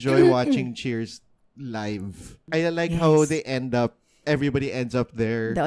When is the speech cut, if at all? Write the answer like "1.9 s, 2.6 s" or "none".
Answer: 2.4 s